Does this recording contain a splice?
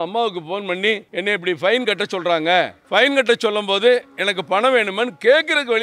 yes; 2 cuts; at 1.1 s, 2.8 s

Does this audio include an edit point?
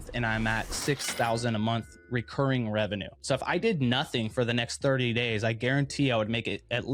yes; 1 cut; at 3.1 s

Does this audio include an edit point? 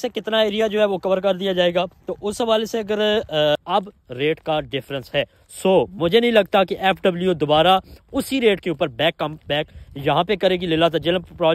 yes; 1 cut; at 3.5 s

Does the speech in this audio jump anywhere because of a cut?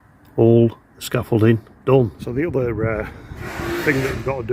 yes; 1 cut; at 2.2 s

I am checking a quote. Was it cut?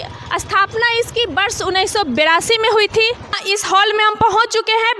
yes; 1 cut; at 3.4 s

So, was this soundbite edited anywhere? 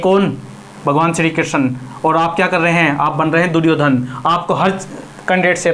no; 0 cuts

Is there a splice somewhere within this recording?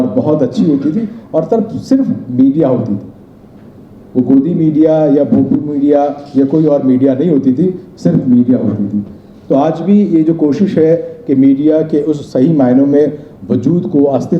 no; 0 cuts

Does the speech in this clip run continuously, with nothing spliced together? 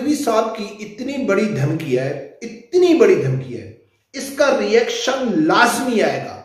yes; 0 cuts

